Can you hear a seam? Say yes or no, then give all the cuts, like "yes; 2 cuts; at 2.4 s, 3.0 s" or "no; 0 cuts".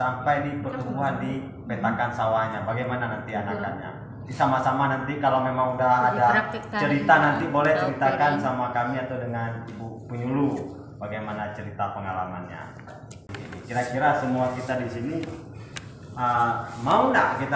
yes; 1 cut; at 13.3 s